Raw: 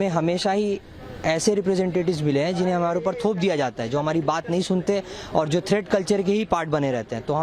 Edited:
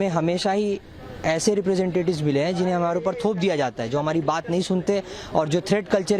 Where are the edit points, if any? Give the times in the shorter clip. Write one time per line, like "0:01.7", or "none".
none